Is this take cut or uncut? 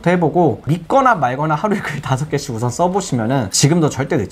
uncut